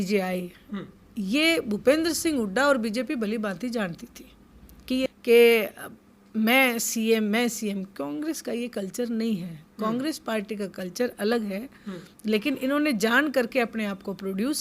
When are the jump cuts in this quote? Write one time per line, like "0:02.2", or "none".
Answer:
0:05.1